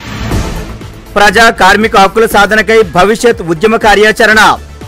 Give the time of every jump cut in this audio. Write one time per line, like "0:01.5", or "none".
none

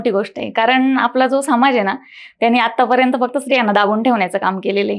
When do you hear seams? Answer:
none

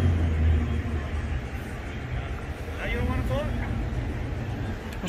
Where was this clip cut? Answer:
0:03.0

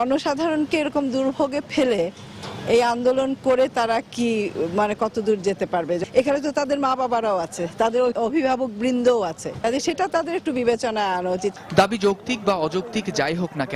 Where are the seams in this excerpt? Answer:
none

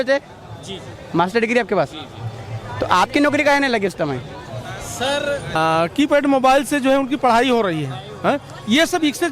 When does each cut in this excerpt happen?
0:05.6

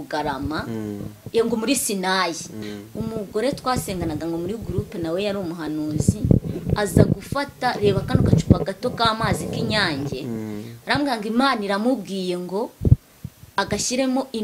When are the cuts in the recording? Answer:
0:02.6

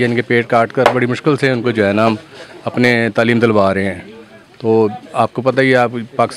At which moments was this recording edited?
none

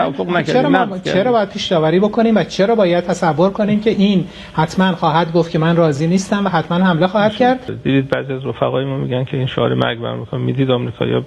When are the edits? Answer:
0:07.7

